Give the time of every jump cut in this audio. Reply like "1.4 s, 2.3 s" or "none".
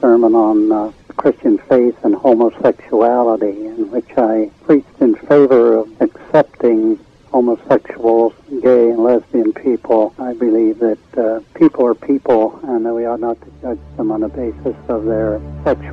none